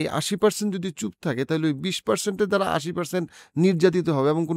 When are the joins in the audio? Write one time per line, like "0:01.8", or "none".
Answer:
none

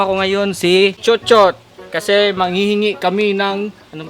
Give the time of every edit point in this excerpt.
0:01.0

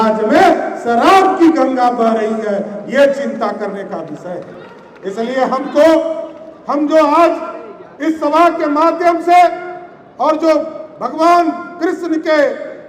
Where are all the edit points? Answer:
none

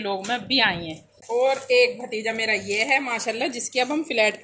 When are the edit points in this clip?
0:01.1

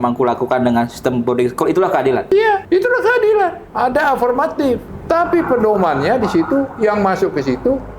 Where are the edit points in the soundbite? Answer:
0:02.4
0:03.6
0:04.9

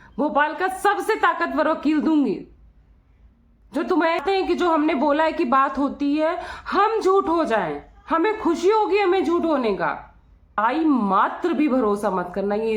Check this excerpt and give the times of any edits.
0:04.2
0:10.6

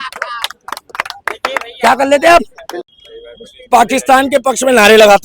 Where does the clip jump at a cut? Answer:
0:03.0

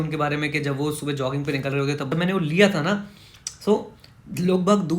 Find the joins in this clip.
0:02.1

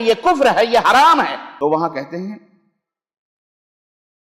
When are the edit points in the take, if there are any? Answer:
0:01.4

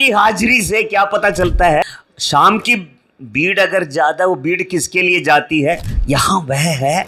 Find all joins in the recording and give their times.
0:01.8
0:05.9

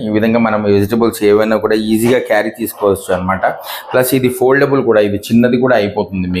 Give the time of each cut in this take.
none

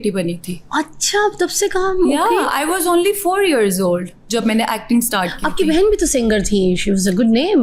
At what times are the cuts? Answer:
none

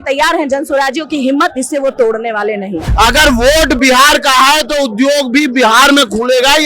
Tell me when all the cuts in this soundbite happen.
0:02.8

